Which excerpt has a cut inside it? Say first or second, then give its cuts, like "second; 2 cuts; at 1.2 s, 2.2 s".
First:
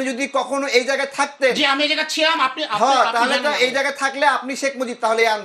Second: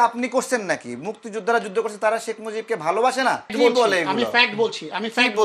second; 1 cut; at 3.5 s